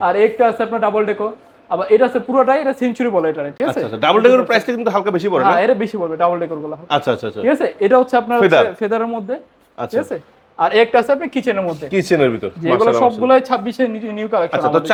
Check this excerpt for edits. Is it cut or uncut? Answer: uncut